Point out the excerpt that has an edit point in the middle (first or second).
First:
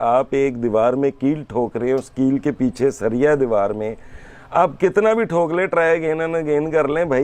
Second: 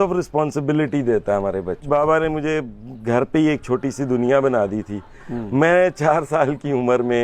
second